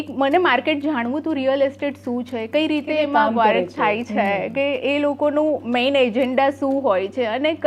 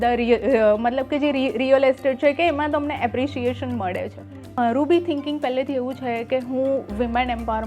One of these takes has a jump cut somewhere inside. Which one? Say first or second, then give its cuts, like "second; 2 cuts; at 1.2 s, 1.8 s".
second; 1 cut; at 4.6 s